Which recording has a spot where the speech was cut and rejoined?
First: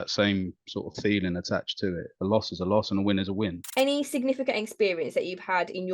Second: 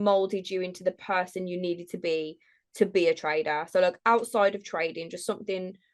first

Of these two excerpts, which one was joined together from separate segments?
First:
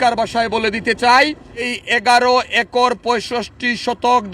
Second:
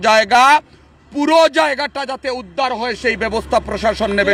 first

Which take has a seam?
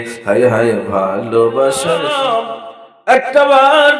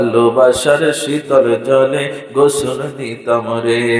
first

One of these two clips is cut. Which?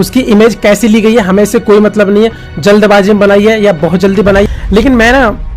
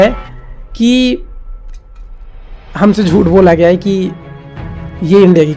first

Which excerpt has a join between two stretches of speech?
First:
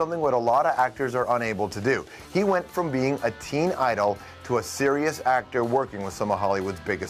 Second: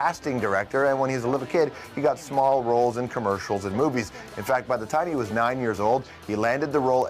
second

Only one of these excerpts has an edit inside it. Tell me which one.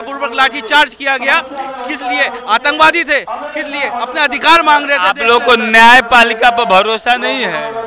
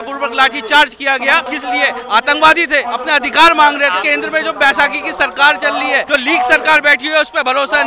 second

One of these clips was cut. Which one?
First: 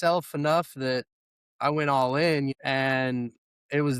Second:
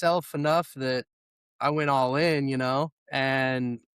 first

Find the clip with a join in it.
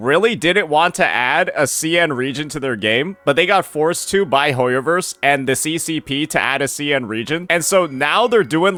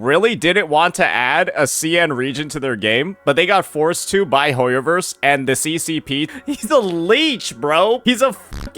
second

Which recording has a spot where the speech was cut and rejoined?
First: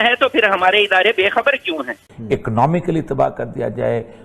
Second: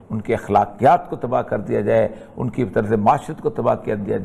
first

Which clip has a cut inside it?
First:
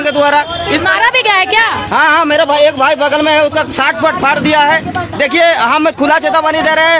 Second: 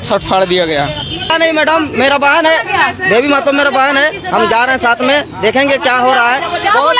second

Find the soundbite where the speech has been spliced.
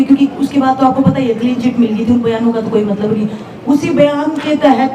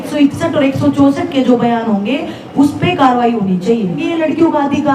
second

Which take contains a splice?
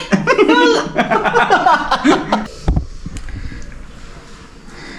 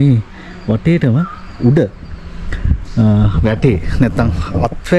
first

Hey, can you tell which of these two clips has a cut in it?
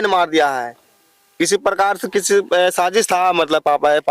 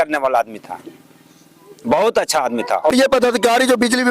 second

